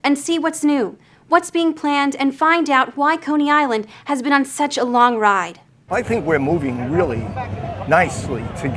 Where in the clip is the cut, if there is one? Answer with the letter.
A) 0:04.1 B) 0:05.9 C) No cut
B